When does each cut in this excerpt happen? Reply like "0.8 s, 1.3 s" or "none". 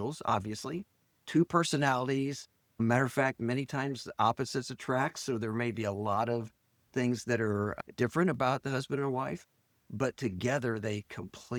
none

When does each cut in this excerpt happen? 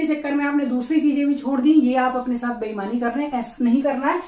none

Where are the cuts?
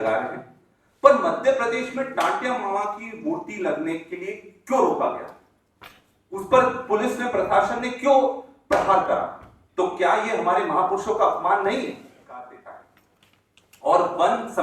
12.2 s

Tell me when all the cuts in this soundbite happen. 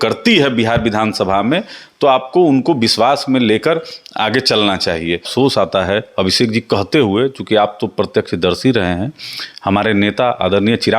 5.3 s

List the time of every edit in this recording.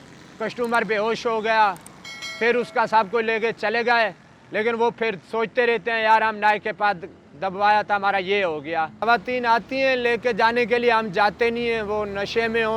9.0 s

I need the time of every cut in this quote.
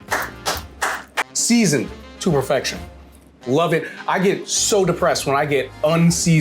1.2 s

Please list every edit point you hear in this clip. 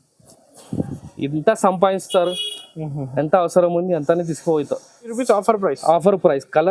5.1 s

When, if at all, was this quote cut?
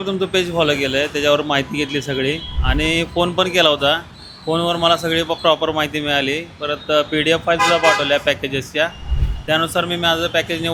none

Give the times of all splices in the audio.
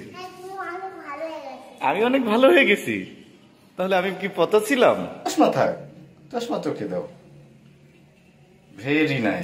5.3 s

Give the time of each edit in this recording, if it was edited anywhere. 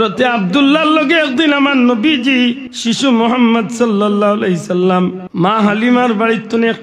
2.7 s, 5.2 s

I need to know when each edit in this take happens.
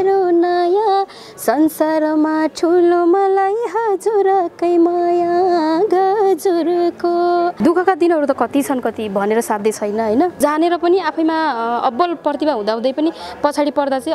7.6 s, 10.4 s

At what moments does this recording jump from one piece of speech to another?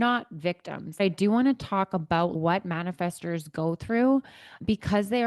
1.0 s

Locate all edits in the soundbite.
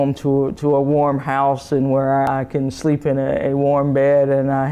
2.3 s

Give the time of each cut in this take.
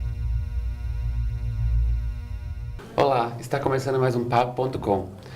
2.8 s

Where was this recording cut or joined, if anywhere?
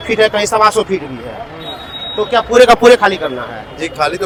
none

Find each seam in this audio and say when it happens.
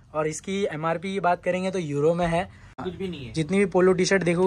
2.9 s

